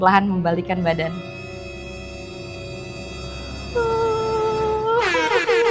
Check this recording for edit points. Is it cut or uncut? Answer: uncut